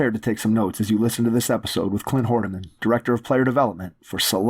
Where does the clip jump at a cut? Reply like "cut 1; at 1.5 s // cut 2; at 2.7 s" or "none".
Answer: none